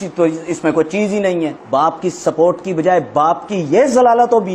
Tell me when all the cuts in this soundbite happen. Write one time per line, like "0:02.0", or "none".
0:01.6